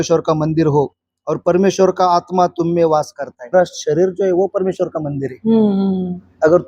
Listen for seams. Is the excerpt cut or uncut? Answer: cut